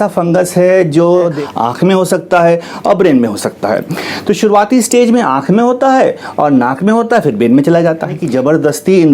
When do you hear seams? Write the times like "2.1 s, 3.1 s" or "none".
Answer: 1.4 s, 8.2 s